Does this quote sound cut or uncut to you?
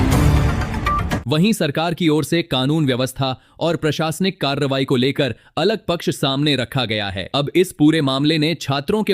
cut